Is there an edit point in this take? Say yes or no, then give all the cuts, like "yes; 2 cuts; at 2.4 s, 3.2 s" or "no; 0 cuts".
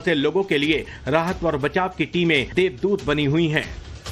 no; 0 cuts